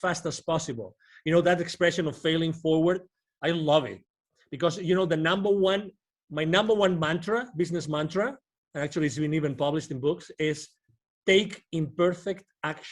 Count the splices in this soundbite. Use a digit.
0